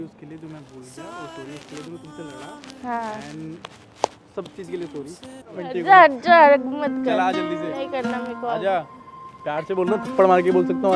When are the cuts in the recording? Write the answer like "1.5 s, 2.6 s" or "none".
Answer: 5.6 s